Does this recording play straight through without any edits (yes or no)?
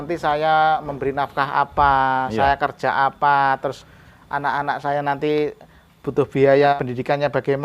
no